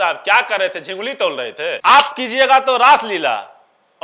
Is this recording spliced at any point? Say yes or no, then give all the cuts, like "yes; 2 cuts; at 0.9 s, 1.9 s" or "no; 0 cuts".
yes; 1 cut; at 1.7 s